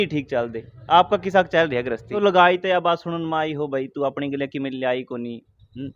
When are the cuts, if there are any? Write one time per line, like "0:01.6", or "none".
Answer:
0:02.1